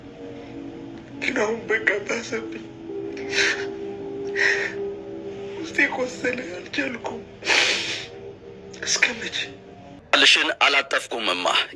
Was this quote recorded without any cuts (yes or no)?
no